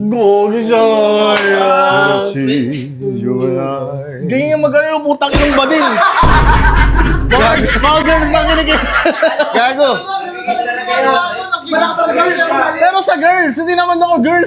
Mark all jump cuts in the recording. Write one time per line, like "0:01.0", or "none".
none